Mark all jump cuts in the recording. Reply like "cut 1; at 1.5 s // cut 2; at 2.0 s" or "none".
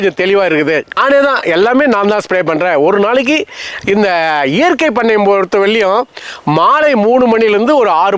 cut 1; at 1.0 s